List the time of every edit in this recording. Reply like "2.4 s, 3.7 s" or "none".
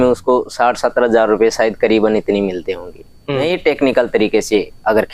3.4 s